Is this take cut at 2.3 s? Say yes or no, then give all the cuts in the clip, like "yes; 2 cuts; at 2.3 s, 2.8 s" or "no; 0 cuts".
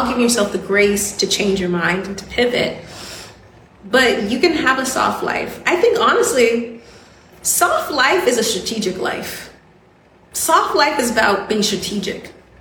no; 1 cut; at 10.2 s